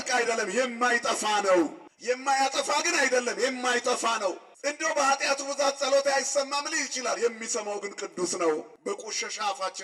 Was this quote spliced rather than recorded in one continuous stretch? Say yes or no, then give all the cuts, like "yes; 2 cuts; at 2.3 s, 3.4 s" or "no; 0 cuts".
yes; 3 cuts; at 1.9 s, 4.5 s, 8.7 s